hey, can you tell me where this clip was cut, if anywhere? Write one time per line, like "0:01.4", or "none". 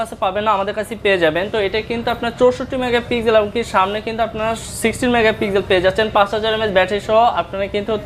none